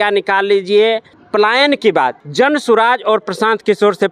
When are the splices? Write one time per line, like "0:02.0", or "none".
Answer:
0:01.1
0:02.2